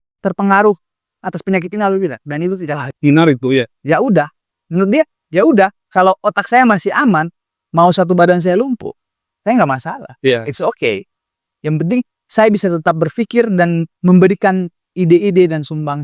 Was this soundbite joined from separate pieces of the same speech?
no; 0 cuts

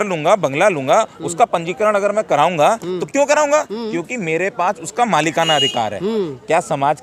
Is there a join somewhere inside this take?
no; 0 cuts

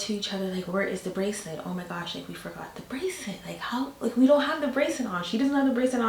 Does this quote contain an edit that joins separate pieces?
no; 0 cuts

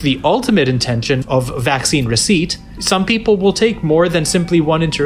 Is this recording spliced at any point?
yes; 1 cut; at 2.6 s

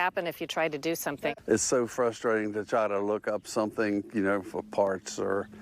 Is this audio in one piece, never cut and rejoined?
no; 1 cut; at 1.2 s

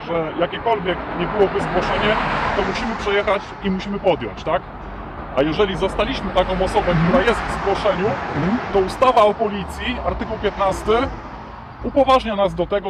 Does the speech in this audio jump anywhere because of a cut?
no; 0 cuts

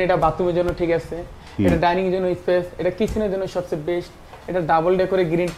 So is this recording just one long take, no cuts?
yes; 0 cuts

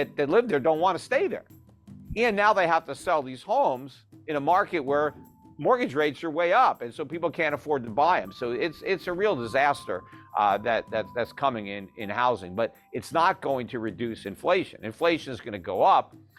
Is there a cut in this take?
no; 0 cuts

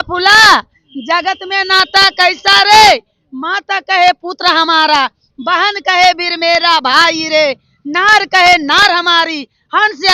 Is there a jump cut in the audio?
no; 0 cuts

